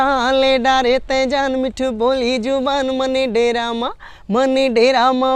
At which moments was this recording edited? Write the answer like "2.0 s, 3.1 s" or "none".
none